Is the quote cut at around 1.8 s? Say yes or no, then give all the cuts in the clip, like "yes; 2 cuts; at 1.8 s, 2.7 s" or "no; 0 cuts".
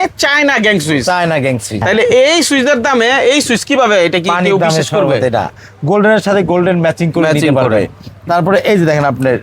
yes; 2 cuts; at 1.8 s, 5.6 s